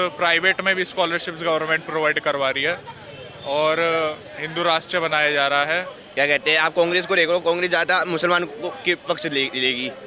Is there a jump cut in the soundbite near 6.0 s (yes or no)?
yes